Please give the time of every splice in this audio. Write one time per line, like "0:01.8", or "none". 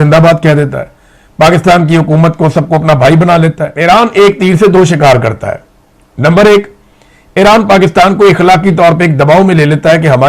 0:03.7